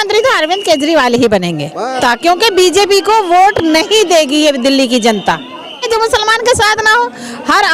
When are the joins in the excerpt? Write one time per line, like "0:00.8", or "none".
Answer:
0:02.0
0:05.8